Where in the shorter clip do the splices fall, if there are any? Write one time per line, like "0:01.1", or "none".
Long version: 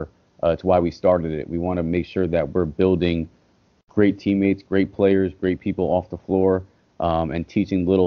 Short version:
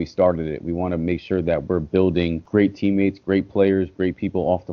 0:02.4

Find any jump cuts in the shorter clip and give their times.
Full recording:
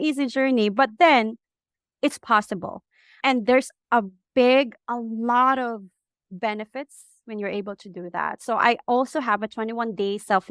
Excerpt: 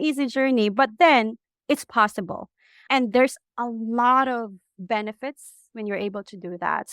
0:01.5
0:03.4
0:04.7

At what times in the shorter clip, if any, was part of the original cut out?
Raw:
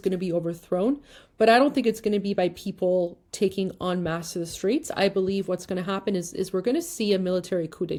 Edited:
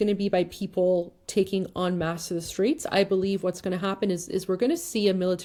none

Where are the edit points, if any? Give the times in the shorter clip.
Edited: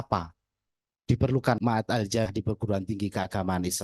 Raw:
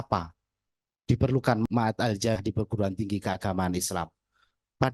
0:01.6

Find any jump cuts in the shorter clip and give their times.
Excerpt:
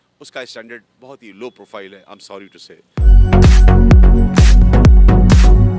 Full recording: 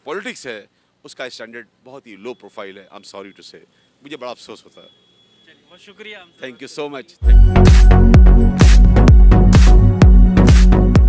0:02.9

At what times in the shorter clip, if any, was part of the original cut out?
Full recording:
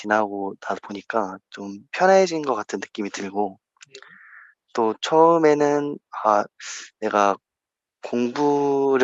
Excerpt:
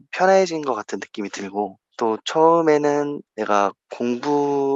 0:01.8
0:03.2
0:03.8

